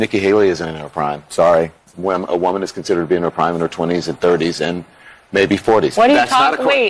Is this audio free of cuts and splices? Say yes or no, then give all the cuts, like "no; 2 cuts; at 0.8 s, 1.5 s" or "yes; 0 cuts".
no; 1 cut; at 5.9 s